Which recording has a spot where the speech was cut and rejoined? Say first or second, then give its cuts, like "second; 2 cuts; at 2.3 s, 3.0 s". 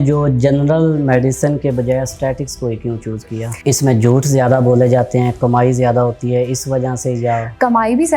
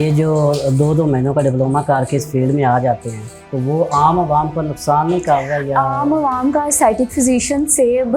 first; 1 cut; at 3.5 s